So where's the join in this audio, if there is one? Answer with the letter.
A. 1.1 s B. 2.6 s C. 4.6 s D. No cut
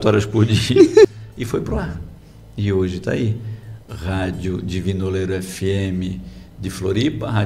A